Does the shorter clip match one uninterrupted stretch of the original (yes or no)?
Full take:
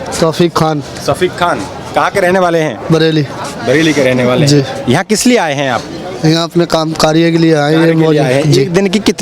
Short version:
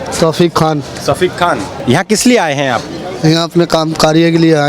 no